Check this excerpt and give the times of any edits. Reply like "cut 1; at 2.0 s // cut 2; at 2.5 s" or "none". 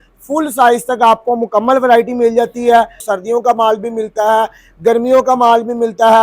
cut 1; at 3.0 s